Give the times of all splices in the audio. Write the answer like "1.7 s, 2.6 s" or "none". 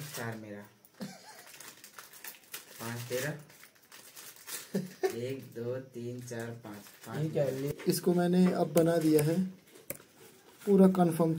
7.7 s